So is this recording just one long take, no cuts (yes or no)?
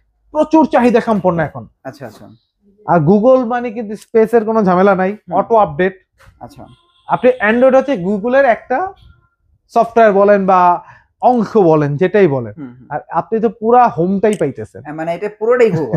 yes